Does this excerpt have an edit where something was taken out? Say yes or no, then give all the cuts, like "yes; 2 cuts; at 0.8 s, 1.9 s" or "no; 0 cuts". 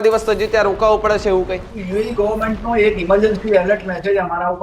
yes; 1 cut; at 1.7 s